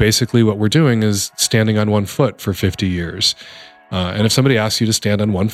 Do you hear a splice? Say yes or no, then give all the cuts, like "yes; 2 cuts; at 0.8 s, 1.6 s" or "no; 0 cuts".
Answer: no; 0 cuts